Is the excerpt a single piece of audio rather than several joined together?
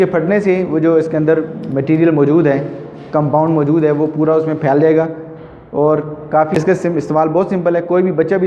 no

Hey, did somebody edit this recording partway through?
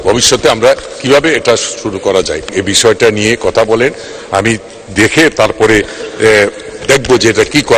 yes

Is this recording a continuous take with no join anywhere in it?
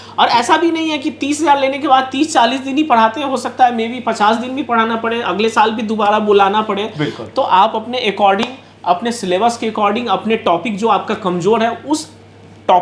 yes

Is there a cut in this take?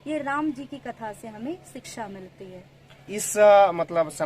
yes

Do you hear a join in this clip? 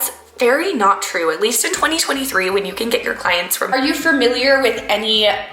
yes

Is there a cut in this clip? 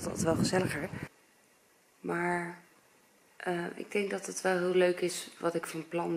yes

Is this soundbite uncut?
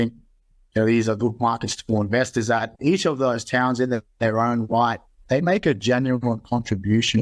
yes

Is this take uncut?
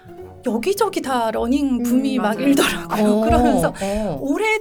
yes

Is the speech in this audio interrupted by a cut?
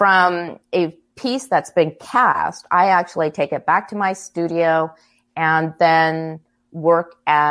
yes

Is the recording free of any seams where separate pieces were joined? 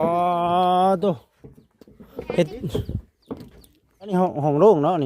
no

